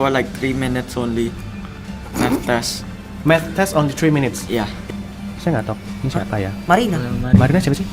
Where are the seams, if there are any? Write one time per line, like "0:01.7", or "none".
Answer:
0:04.8

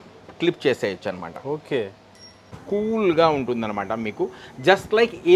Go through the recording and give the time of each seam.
0:02.4

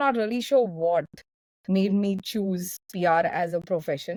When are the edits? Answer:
none

